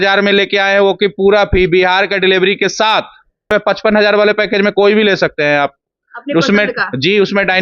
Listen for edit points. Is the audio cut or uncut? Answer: cut